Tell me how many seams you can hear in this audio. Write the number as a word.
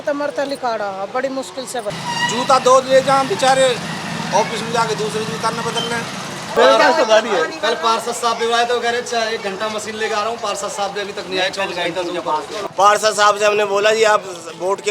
three